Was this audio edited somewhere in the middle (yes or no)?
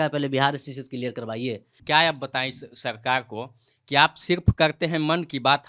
yes